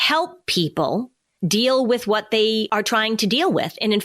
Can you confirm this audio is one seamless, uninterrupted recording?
no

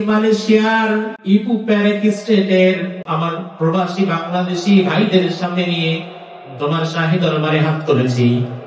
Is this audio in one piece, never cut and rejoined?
no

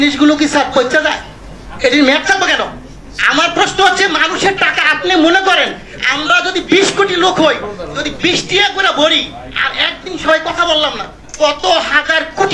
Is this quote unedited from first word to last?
yes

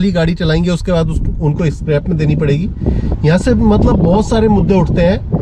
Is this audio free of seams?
yes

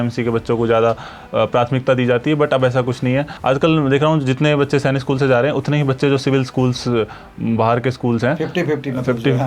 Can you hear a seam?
yes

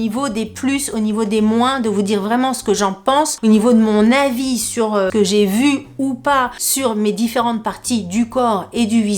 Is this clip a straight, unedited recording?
no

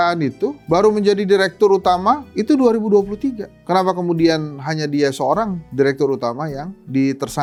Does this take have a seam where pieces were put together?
no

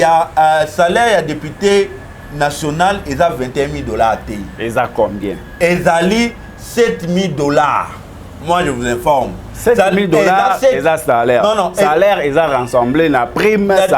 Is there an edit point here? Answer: no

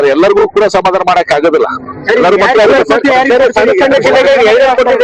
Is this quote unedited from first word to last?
yes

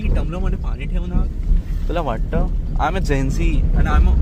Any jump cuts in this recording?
no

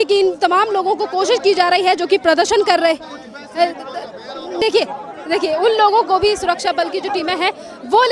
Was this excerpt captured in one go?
no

